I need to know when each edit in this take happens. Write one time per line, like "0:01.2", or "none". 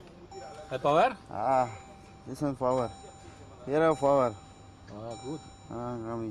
none